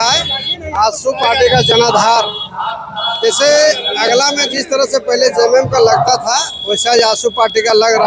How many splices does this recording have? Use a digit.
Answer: 0